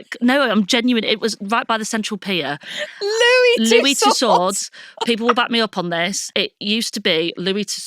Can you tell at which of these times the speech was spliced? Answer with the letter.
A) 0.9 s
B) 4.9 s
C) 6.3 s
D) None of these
C